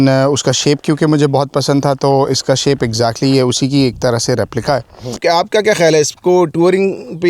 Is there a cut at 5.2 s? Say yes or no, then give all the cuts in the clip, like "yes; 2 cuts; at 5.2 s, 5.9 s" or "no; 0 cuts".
yes; 1 cut; at 5.2 s